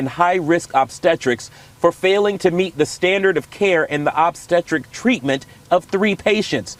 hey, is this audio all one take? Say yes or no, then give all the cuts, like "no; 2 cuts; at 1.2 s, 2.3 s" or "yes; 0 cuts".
yes; 0 cuts